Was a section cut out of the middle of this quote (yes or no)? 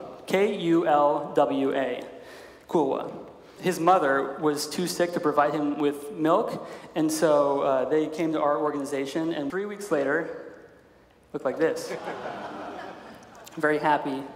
yes